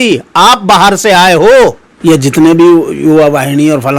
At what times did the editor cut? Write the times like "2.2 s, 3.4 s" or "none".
1.9 s